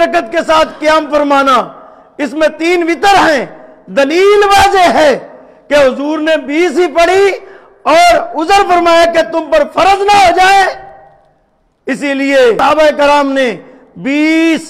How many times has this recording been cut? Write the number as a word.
one